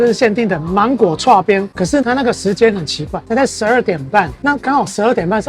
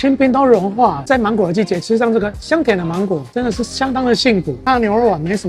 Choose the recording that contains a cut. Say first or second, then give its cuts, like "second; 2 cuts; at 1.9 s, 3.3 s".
second; 2 cuts; at 1.0 s, 4.5 s